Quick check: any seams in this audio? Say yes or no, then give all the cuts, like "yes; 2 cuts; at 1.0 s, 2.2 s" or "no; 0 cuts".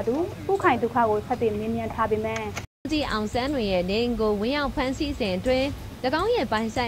yes; 1 cut; at 2.9 s